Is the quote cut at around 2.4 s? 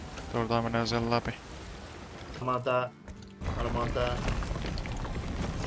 yes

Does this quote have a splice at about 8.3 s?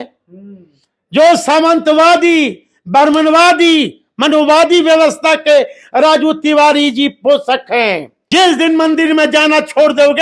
yes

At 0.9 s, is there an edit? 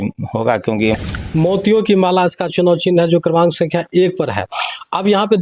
yes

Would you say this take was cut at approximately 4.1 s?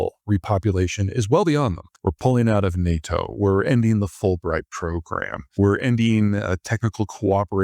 no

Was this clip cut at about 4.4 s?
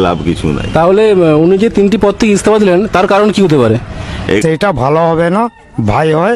yes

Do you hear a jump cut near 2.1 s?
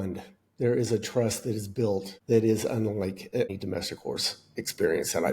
yes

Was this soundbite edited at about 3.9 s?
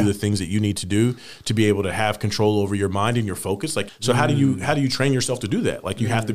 yes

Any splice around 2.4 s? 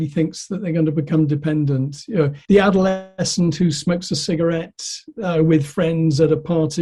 yes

